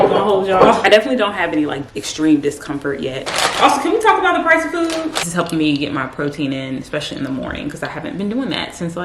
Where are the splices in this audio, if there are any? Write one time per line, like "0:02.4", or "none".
0:00.8
0:03.3
0:05.2